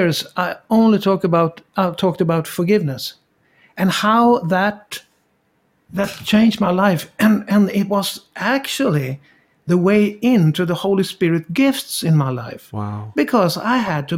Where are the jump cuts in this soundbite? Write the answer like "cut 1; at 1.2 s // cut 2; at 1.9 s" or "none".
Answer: none